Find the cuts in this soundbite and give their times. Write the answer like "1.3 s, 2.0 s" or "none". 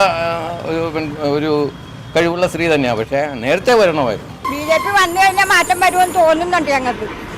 4.4 s